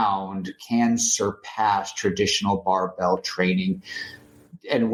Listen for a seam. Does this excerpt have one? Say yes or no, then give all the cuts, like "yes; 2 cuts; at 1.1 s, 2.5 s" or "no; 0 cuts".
no; 0 cuts